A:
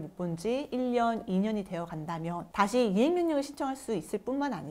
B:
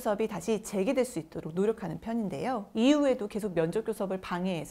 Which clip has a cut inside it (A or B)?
B